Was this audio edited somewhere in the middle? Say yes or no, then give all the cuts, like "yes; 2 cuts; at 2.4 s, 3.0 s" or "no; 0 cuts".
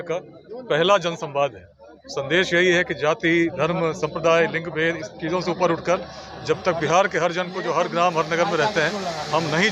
no; 0 cuts